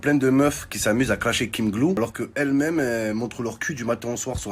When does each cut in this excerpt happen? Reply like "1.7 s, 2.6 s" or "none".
2.0 s